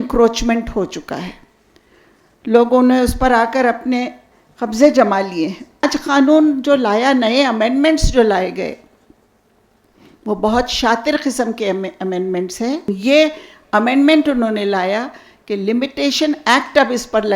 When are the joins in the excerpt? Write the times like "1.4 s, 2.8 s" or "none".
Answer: 5.9 s, 12.9 s

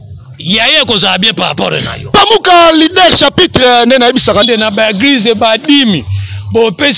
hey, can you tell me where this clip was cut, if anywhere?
4.4 s

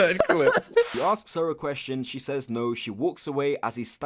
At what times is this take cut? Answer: 0.9 s

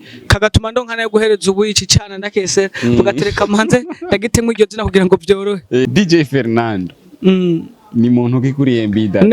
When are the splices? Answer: 5.9 s

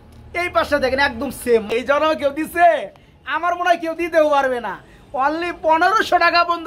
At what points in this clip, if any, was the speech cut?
1.8 s

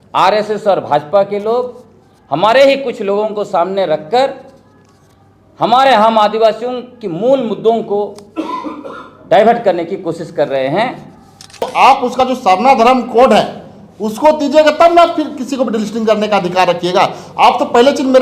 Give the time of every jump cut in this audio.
11.6 s

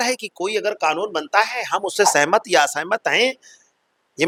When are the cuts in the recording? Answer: none

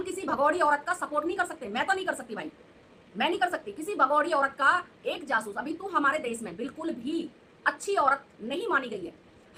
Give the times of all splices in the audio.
none

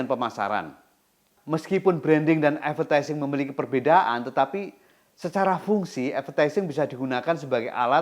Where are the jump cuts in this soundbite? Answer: 1.3 s

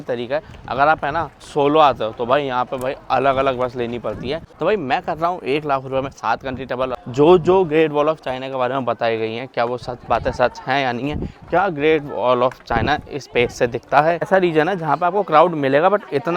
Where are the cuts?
1.4 s, 4.5 s, 6.9 s, 14.3 s

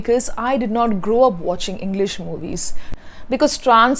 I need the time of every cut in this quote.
2.9 s

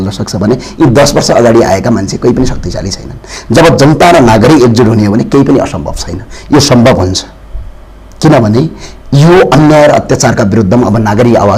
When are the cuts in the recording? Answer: none

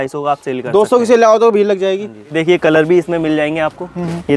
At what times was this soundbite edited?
none

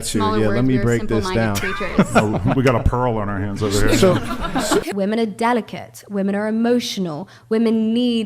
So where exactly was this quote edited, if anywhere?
4.9 s

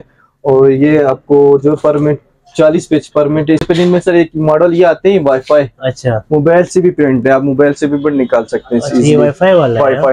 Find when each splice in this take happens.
3.7 s

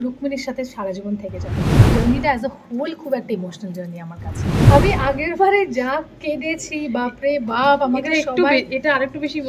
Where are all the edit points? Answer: 1.8 s, 4.5 s

